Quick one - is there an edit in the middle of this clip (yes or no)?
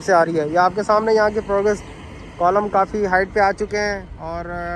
no